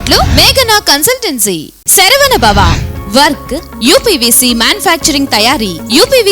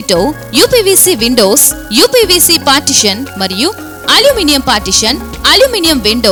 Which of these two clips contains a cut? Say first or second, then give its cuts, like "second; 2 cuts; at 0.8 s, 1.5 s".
first; 1 cut; at 1.8 s